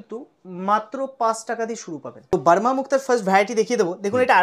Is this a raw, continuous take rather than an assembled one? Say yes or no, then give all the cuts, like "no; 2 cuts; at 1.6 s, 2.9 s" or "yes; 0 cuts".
no; 1 cut; at 2.3 s